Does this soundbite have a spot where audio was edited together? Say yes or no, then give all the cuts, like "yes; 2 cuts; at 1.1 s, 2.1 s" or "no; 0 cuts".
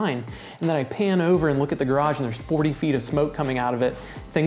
no; 0 cuts